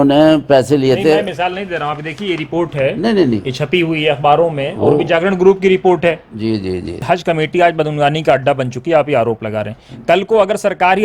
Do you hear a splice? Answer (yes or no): yes